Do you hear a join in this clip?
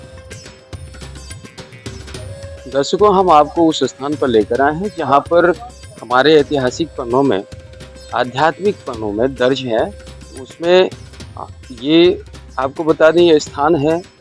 yes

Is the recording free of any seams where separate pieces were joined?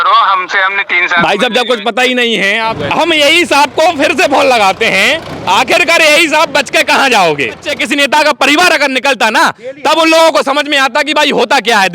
no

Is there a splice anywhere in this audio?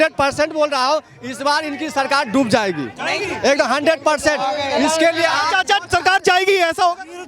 no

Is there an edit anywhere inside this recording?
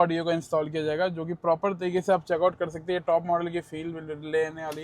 no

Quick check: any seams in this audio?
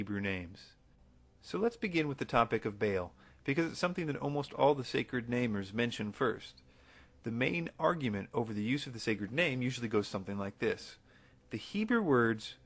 no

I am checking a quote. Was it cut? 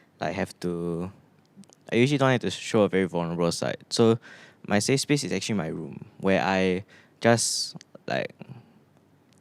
no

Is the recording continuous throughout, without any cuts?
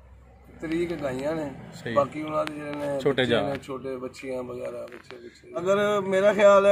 no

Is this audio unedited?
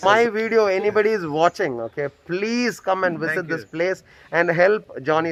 yes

